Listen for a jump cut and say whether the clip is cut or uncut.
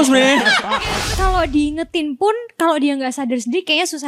cut